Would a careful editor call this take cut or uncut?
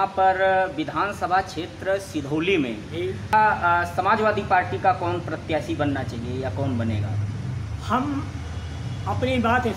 cut